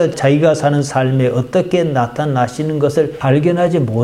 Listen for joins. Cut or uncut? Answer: uncut